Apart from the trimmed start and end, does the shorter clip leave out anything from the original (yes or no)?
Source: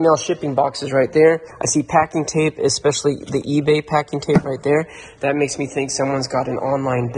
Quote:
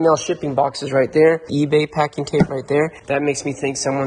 yes